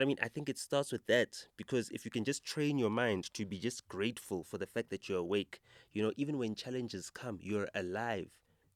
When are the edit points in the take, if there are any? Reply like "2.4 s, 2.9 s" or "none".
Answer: none